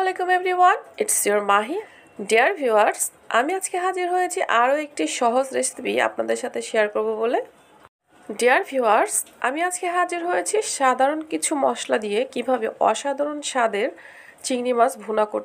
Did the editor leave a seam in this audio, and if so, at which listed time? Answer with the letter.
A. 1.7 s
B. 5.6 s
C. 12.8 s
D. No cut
A